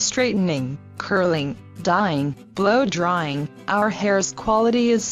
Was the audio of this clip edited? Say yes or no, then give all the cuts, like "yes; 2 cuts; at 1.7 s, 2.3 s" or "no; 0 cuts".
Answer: yes; 1 cut; at 1.8 s